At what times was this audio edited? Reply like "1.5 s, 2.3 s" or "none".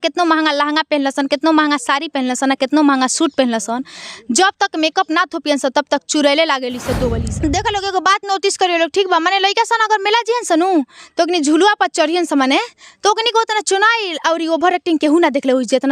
7.2 s